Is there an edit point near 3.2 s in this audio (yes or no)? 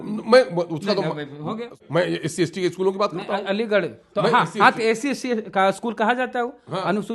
no